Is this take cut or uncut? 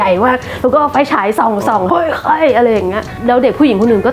cut